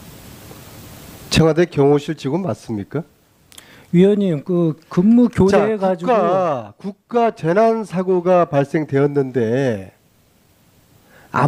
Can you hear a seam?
yes; 1 cut; at 3.8 s

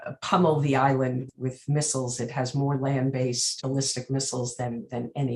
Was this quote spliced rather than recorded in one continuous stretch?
yes; 2 cuts; at 1.3 s, 3.6 s

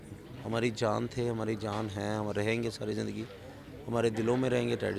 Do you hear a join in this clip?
no; 0 cuts

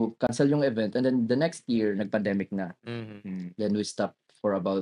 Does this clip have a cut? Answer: no; 0 cuts

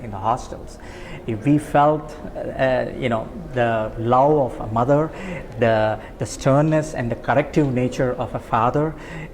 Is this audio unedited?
yes; 0 cuts

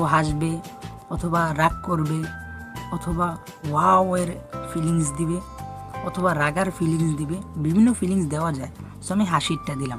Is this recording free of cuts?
yes; 0 cuts

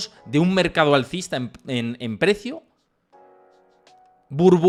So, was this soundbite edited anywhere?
no; 0 cuts

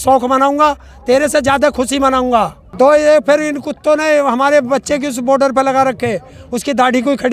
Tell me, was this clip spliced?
yes; 1 cut; at 2.5 s

